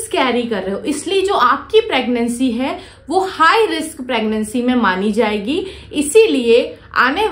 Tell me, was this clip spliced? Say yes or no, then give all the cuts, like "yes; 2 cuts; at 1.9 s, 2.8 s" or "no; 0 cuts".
no; 0 cuts